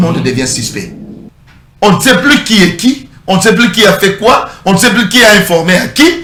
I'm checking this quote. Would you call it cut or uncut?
uncut